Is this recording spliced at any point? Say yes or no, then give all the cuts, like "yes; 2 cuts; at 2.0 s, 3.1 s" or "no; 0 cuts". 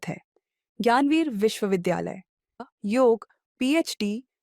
yes; 1 cut; at 2.6 s